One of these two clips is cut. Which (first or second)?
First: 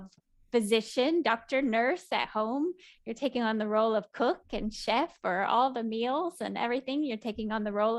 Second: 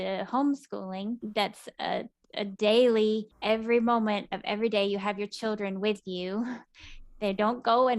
second